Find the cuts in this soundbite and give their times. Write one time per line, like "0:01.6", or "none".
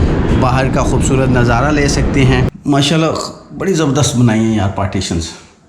0:02.5